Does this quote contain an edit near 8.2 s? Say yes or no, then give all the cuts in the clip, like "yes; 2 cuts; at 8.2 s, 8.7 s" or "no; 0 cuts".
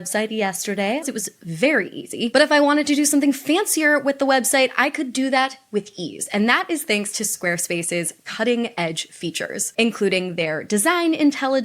no; 1 cut; at 1.0 s